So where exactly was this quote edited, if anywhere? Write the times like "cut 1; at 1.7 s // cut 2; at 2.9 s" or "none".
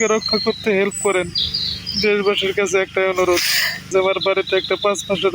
cut 1; at 3.9 s